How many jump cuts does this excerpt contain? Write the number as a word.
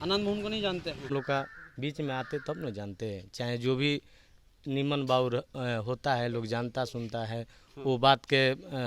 one